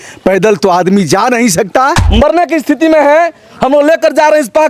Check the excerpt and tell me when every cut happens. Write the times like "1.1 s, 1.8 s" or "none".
2.0 s